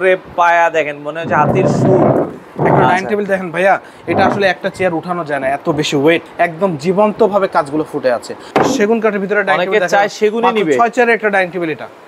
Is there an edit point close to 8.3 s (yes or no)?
yes